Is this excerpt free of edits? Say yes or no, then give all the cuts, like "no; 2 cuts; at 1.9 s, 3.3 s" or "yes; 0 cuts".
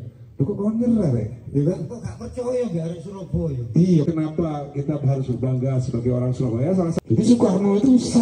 no; 2 cuts; at 4.0 s, 7.0 s